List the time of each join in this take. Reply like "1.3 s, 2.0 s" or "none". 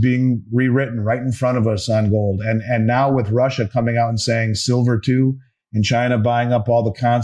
none